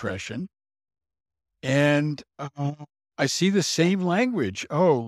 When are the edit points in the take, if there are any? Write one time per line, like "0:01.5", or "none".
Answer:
none